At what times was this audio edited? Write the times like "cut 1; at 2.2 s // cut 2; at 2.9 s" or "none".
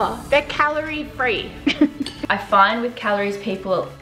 cut 1; at 2.2 s